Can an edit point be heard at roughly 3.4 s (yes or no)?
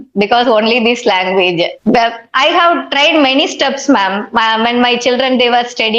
no